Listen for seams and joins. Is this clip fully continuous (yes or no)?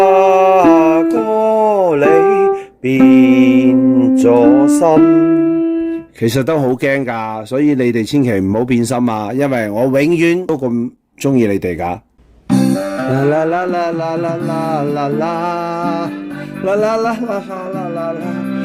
no